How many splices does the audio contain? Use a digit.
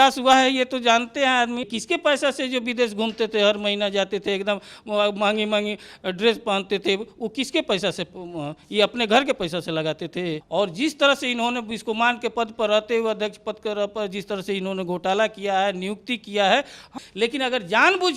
3